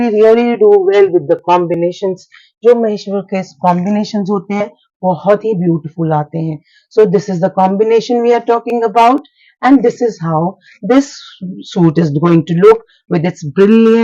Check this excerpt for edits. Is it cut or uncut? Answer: uncut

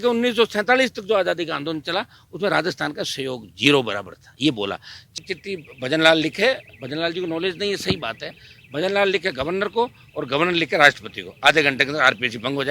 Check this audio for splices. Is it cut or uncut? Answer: cut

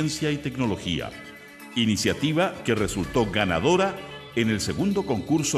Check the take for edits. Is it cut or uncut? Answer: uncut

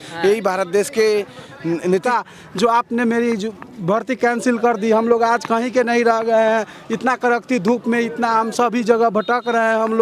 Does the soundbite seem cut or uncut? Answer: cut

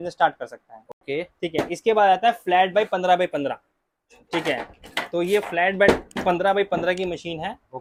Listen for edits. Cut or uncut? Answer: uncut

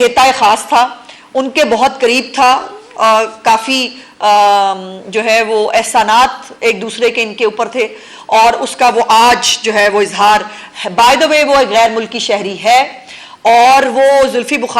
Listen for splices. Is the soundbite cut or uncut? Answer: uncut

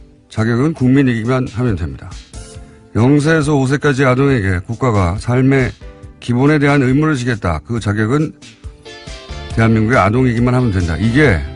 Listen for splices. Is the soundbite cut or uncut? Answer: cut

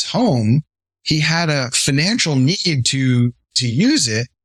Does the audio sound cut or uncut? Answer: uncut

